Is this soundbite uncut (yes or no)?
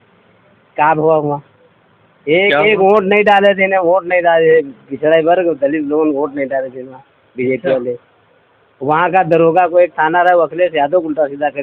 yes